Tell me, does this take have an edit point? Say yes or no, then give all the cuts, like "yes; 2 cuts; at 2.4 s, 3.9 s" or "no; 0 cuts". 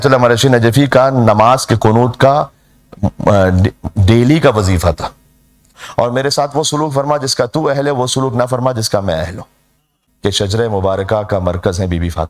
yes; 2 cuts; at 5.8 s, 10.0 s